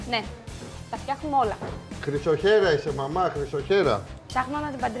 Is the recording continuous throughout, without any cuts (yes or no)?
yes